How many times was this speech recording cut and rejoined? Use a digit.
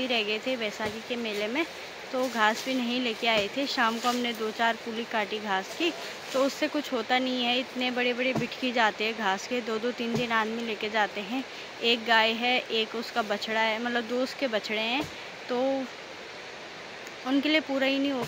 0